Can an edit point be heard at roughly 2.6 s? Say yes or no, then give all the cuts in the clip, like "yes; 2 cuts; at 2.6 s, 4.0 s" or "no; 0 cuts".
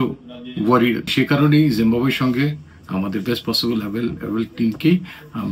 no; 1 cut; at 1.1 s